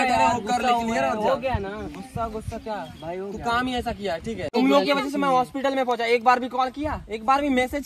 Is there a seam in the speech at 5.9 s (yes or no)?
no